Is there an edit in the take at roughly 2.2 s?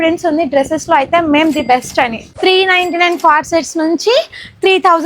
yes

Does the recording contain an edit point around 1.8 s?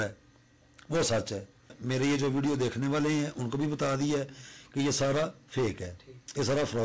yes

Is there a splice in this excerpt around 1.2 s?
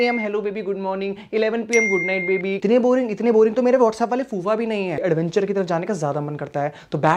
no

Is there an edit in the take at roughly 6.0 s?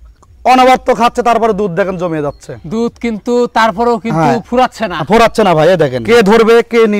yes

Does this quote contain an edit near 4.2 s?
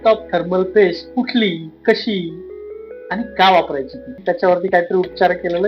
yes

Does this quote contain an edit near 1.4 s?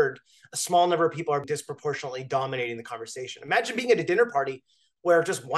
yes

